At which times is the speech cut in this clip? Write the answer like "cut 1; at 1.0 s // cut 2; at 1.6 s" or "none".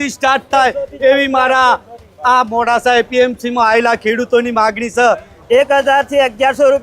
cut 1; at 5.3 s